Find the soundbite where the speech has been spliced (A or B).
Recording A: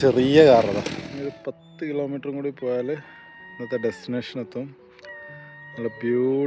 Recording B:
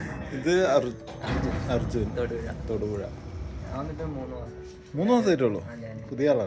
A